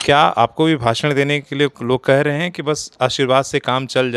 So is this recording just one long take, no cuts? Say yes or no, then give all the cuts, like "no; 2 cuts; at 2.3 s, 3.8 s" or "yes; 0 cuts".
yes; 0 cuts